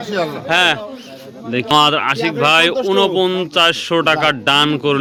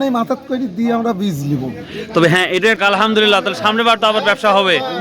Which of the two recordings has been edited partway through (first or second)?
second